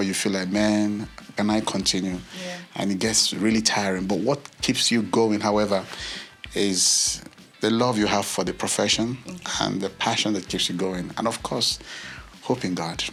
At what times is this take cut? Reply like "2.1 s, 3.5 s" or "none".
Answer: none